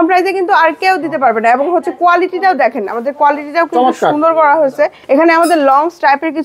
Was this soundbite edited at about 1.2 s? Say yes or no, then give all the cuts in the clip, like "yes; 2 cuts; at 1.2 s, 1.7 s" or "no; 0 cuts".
no; 1 cut; at 5.0 s